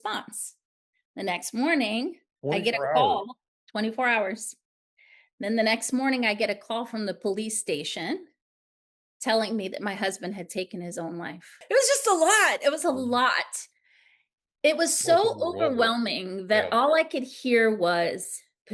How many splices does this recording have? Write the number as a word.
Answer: one